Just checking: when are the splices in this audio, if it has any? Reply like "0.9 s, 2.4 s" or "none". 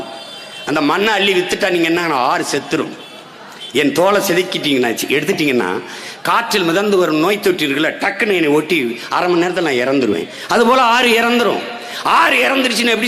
none